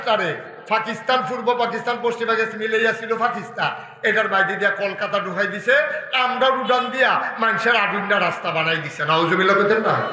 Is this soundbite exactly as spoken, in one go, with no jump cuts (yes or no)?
yes